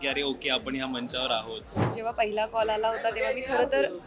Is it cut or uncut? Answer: cut